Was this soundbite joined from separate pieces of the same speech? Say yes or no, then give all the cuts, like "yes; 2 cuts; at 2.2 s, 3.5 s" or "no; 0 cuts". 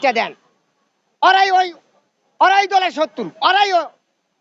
no; 0 cuts